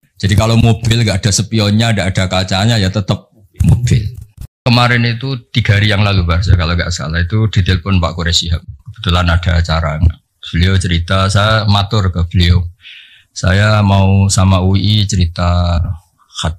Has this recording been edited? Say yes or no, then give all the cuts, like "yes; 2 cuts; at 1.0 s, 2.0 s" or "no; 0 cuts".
yes; 1 cut; at 4.6 s